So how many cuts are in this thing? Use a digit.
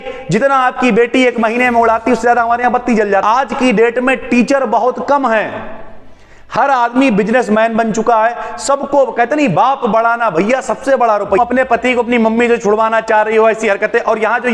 2